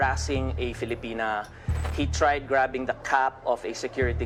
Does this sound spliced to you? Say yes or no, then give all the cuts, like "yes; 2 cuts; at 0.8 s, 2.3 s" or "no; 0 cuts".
no; 0 cuts